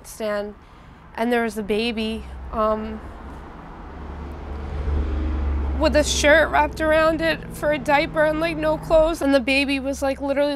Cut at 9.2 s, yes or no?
yes